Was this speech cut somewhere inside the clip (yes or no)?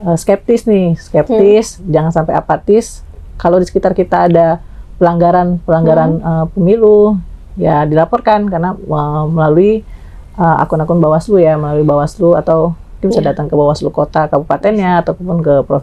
no